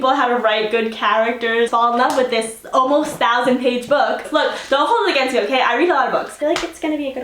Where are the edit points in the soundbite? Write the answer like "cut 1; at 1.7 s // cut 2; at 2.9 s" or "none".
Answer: cut 1; at 1.7 s // cut 2; at 4.3 s // cut 3; at 6.4 s